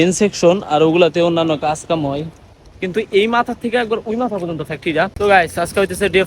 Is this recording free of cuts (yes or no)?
no